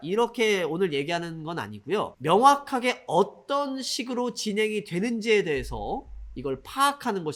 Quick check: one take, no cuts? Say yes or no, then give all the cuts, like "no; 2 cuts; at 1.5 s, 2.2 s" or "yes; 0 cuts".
yes; 0 cuts